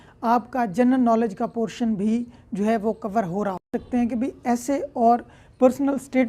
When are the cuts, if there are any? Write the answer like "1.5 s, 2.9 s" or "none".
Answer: 3.8 s

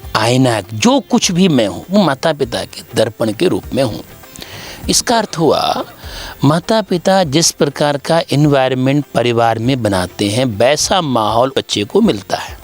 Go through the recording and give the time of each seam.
11.5 s

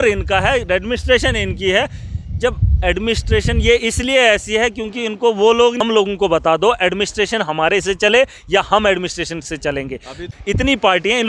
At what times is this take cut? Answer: 5.8 s, 10.3 s

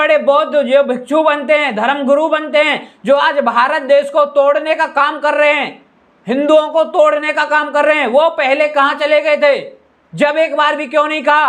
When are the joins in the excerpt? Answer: none

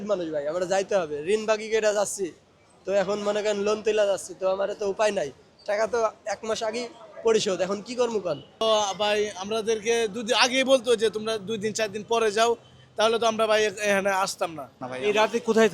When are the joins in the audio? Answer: 8.6 s, 14.8 s

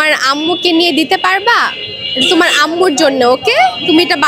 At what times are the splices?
none

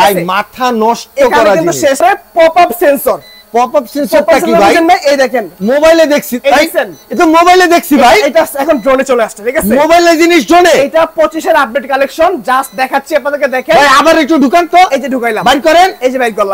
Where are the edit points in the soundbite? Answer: 2.0 s

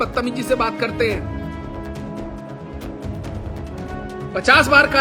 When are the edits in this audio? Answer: none

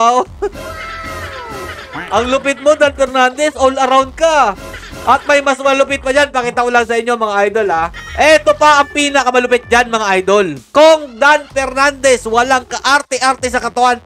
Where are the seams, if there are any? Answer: 7.9 s, 10.6 s

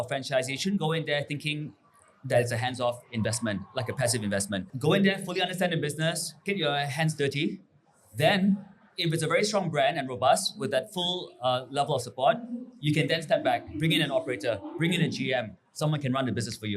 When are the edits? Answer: 6.4 s, 13.7 s

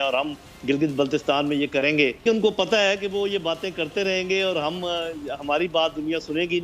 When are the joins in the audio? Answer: 2.2 s

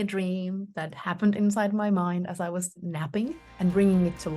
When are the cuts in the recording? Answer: 3.1 s

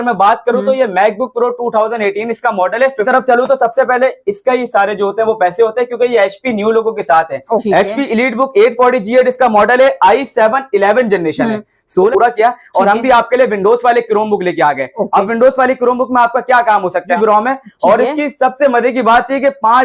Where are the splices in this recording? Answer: 3.1 s, 7.6 s, 12.0 s, 17.2 s

